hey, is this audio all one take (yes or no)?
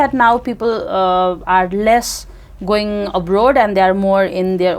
yes